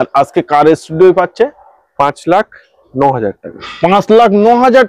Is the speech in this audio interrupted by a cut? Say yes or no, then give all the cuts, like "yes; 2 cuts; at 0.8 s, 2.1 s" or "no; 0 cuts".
no; 0 cuts